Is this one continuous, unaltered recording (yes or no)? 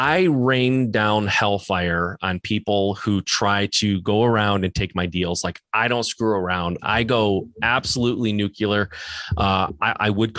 yes